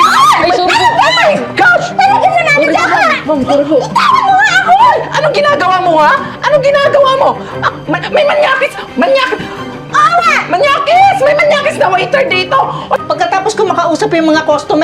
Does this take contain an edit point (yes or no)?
yes